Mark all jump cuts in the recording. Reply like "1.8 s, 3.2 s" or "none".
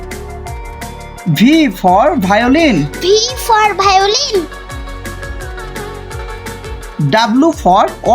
0.9 s